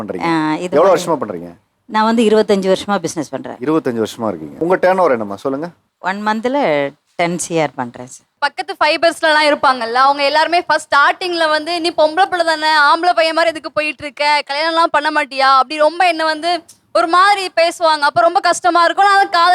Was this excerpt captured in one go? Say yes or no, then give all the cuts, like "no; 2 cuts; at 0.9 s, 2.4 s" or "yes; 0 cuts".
no; 1 cut; at 8.3 s